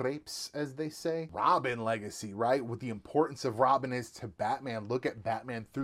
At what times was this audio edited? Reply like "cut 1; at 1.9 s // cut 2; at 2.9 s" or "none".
cut 1; at 1.3 s